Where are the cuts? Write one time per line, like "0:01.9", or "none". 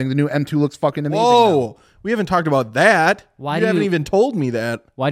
none